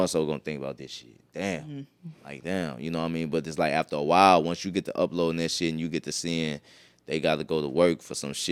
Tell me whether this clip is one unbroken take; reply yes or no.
yes